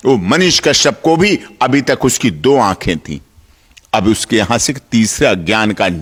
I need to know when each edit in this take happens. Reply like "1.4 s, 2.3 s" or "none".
none

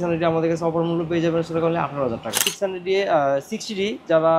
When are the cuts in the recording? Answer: 2.4 s

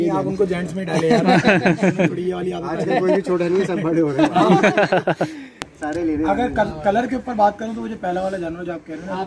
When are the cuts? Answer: 5.6 s

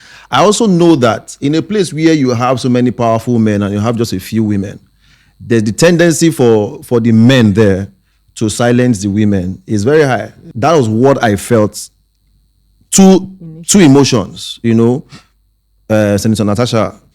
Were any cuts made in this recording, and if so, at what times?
10.4 s

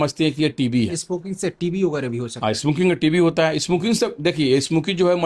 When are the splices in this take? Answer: 1.0 s

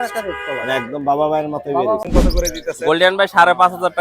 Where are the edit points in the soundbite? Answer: 2.1 s

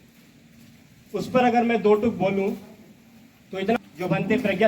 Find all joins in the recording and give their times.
3.8 s

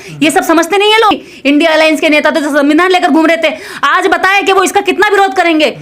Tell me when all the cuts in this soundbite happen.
1.1 s

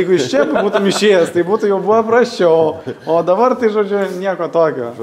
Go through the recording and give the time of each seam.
none

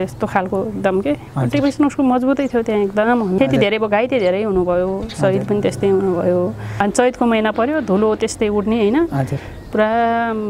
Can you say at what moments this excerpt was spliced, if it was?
3.4 s, 6.8 s

